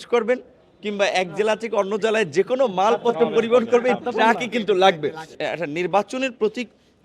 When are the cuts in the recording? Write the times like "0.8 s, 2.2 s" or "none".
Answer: 5.4 s